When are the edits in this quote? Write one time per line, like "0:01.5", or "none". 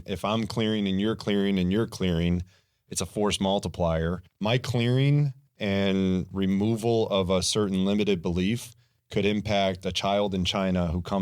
0:04.3